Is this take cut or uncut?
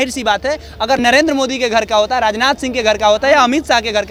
uncut